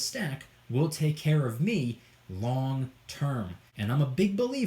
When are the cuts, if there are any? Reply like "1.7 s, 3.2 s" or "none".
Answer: 3.6 s